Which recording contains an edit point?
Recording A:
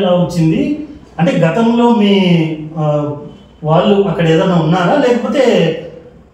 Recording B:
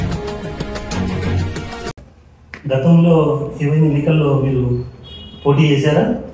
B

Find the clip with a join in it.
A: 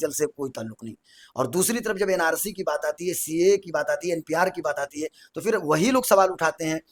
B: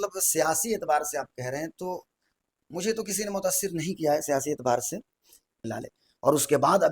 B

